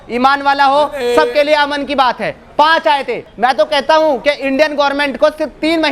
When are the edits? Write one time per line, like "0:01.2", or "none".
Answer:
0:03.3